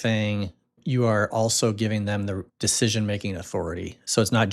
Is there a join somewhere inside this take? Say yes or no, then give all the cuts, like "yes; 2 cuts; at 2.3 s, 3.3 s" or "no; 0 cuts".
yes; 2 cuts; at 0.8 s, 2.5 s